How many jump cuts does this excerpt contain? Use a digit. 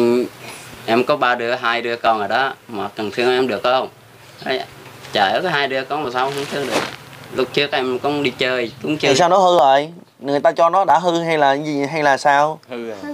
1